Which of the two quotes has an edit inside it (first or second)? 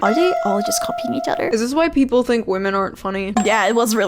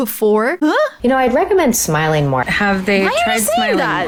first